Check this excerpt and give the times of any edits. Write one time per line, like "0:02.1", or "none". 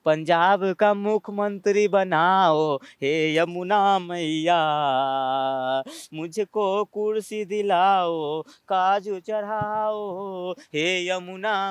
none